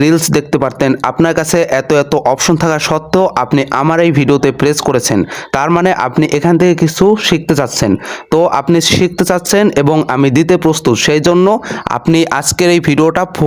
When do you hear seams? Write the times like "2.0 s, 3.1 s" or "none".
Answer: none